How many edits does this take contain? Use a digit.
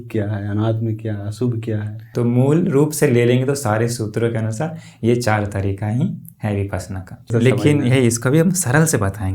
2